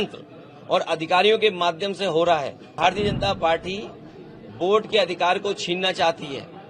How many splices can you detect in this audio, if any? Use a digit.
1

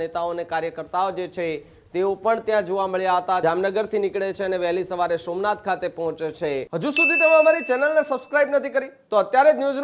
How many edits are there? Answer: 2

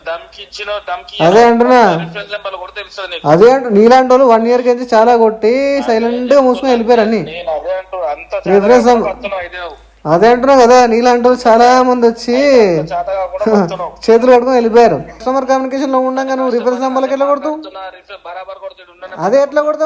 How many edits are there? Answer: 1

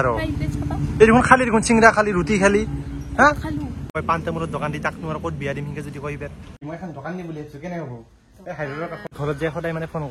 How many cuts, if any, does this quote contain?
3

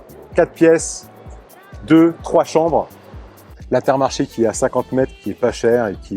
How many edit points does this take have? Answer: 1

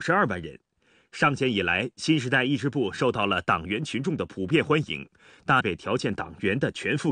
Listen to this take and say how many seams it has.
0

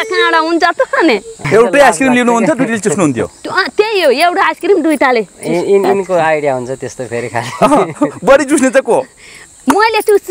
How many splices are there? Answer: 1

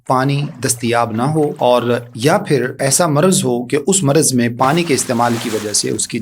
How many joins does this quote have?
2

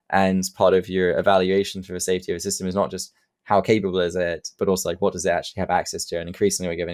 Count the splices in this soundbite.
0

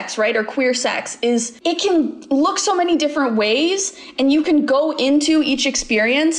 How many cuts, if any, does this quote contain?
0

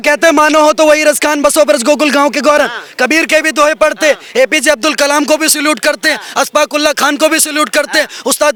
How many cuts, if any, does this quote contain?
0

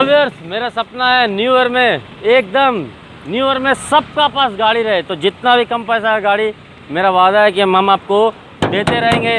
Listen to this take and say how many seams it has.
0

